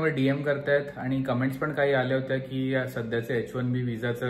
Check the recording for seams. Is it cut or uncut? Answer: uncut